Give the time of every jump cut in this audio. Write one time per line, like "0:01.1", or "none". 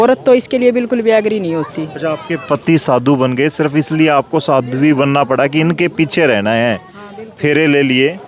none